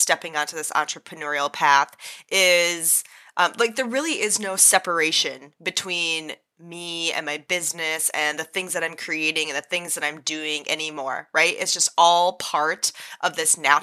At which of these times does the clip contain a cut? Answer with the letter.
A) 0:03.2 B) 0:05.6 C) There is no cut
C